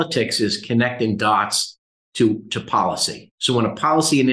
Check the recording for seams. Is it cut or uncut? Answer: uncut